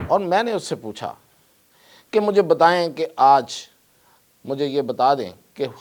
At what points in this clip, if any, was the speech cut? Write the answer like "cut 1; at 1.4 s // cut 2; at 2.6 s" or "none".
none